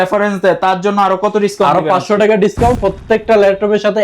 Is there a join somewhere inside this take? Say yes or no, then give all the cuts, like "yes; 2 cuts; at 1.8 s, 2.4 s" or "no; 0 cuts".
yes; 1 cut; at 2.8 s